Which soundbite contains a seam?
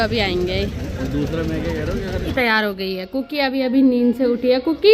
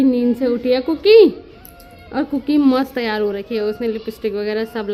first; 1 cut; at 2.3 s

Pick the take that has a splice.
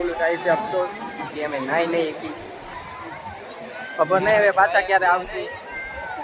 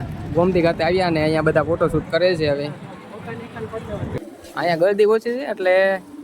second; 1 cut; at 4.2 s

